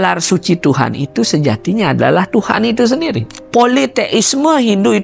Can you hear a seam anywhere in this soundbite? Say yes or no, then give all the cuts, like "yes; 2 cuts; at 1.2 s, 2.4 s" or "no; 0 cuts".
yes; 1 cut; at 3.3 s